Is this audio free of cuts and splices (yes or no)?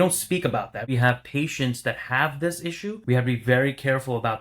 no